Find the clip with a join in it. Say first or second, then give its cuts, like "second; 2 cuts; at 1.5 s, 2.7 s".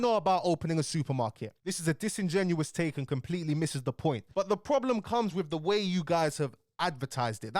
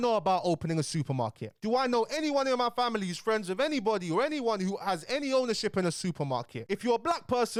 first; 2 cuts; at 1.5 s, 4.3 s